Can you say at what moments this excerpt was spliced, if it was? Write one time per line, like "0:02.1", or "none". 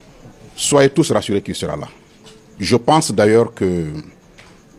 none